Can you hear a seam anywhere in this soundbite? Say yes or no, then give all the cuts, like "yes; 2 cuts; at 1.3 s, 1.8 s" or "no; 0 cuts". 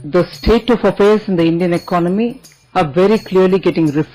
no; 0 cuts